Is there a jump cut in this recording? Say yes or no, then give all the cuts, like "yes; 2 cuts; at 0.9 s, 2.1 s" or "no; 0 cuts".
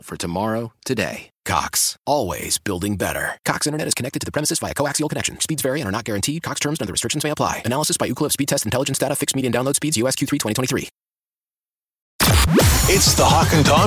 yes; 1 cut; at 12.1 s